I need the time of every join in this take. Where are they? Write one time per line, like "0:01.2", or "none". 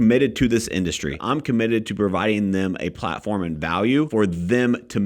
0:01.2
0:04.1